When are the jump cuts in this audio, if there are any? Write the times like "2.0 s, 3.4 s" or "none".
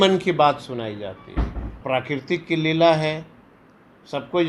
1.8 s